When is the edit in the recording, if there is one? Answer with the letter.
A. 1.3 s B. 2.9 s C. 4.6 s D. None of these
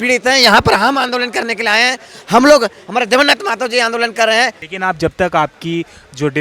C